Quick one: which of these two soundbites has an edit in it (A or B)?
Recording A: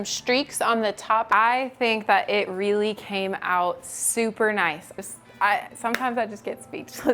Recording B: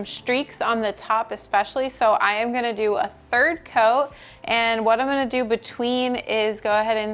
A